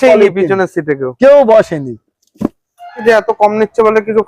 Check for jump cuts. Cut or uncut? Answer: cut